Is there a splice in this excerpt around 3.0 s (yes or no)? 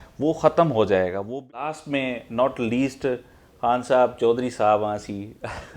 no